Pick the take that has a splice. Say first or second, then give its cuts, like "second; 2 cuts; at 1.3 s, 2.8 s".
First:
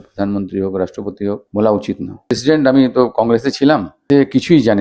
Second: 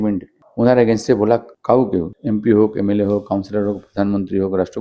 first; 1 cut; at 2.1 s